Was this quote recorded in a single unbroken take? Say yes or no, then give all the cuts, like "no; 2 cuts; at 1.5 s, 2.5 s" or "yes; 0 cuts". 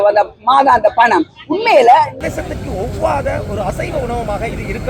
no; 1 cut; at 2.2 s